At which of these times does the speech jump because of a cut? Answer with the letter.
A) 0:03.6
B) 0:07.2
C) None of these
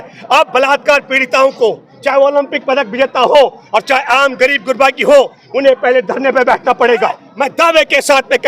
B